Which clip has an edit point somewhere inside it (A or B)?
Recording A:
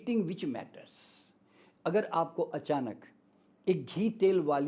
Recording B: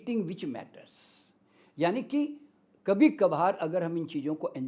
A